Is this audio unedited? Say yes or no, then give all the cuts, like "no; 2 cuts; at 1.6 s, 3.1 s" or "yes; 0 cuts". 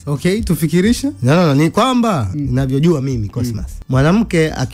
no; 1 cut; at 3.7 s